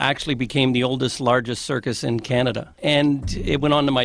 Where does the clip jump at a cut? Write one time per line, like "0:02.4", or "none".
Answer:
0:02.7